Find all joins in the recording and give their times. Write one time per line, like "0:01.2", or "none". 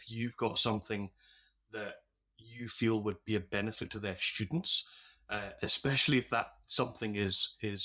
none